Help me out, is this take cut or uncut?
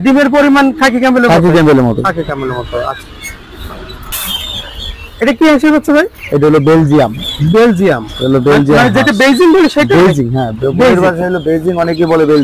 uncut